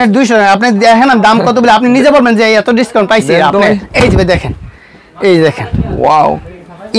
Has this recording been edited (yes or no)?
no